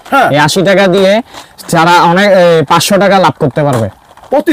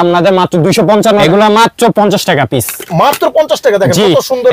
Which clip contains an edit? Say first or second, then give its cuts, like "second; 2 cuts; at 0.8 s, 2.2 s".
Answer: second; 1 cut; at 1.2 s